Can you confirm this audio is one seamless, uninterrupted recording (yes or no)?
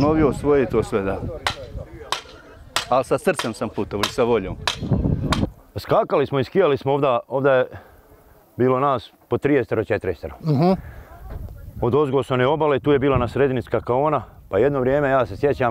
no